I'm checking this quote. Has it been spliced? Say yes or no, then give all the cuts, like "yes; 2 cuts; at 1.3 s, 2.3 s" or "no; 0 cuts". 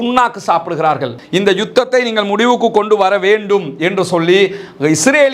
yes; 1 cut; at 1.2 s